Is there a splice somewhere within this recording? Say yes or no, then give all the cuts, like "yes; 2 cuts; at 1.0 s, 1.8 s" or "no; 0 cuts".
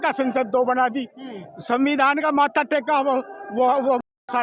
no; 0 cuts